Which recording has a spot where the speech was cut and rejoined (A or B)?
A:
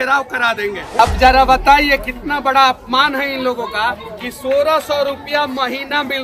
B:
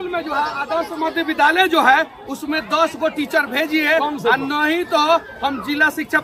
A